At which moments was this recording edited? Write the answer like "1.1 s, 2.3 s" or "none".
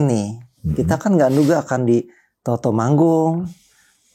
none